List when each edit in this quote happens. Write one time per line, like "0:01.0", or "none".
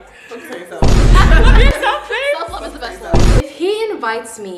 0:03.4